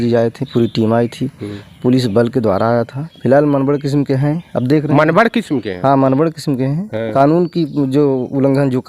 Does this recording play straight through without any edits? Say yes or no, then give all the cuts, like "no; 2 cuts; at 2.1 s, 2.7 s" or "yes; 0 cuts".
no; 2 cuts; at 3.0 s, 7.0 s